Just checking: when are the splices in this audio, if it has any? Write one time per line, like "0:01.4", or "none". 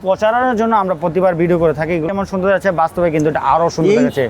0:02.1